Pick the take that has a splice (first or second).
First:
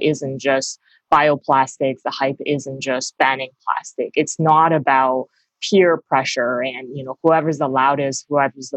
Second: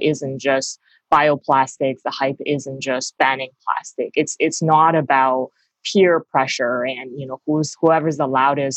first